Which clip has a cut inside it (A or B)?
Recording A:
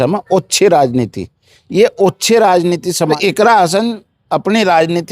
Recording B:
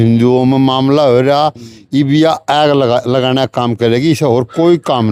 A